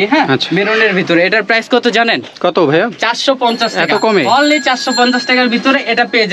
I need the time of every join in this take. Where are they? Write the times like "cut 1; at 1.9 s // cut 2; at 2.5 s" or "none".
none

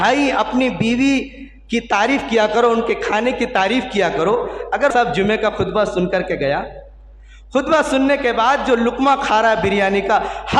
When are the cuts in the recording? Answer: cut 1; at 4.9 s

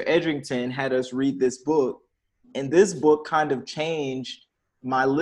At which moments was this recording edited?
none

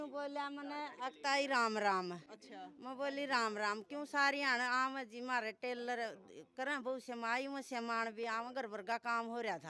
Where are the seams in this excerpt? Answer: none

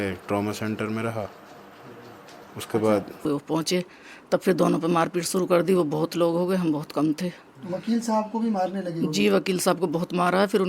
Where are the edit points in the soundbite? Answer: cut 1; at 3.2 s

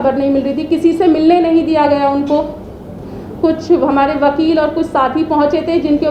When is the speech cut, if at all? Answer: none

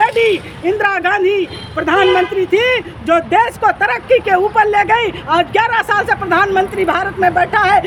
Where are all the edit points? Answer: none

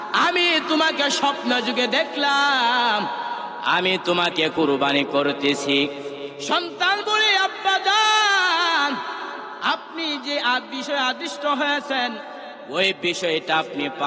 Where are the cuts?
cut 1; at 6.2 s

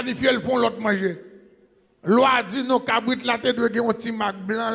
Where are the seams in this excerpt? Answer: none

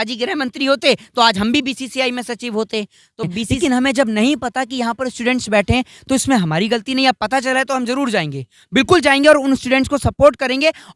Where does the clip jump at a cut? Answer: cut 1; at 3.4 s

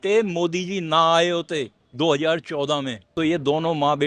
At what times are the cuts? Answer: cut 1; at 1.8 s // cut 2; at 3.0 s

